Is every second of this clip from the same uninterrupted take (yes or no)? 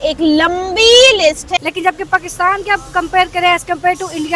no